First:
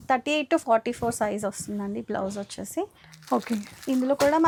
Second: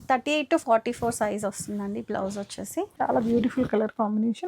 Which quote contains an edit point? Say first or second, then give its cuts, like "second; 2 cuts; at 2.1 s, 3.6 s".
second; 1 cut; at 2.9 s